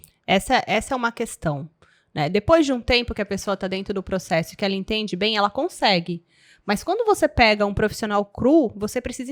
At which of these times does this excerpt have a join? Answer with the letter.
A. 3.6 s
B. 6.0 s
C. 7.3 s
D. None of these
D